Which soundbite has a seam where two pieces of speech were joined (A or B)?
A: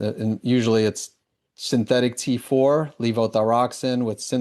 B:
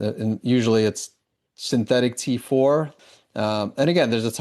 B